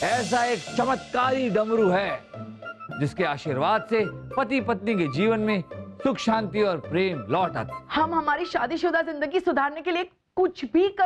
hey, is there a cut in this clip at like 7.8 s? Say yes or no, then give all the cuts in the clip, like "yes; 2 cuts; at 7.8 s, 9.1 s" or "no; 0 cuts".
yes; 1 cut; at 7.8 s